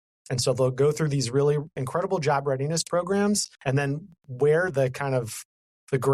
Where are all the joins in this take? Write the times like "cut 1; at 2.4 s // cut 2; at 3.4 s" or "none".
cut 1; at 3.5 s